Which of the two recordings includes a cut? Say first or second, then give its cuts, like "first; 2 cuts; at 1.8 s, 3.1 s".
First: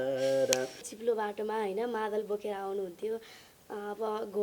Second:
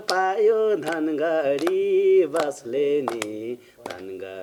first; 1 cut; at 0.9 s